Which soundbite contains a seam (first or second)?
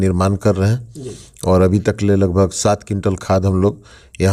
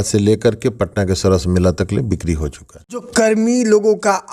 second